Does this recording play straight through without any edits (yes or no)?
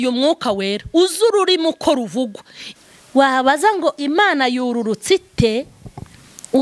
no